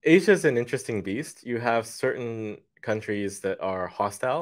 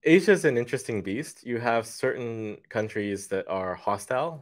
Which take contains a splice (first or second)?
second